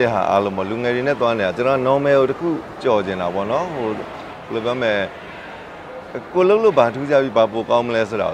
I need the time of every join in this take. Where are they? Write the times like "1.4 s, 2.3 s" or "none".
none